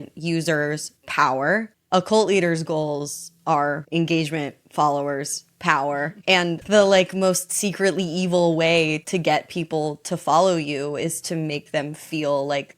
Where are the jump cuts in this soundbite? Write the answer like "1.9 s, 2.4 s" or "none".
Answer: 3.8 s, 6.6 s